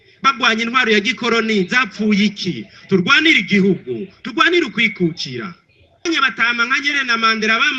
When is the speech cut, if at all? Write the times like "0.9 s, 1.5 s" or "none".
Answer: 6.0 s